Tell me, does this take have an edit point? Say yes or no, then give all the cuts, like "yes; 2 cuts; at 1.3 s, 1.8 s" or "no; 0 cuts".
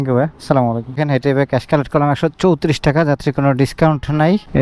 no; 0 cuts